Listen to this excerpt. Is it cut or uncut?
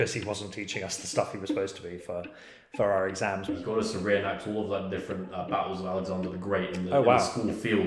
cut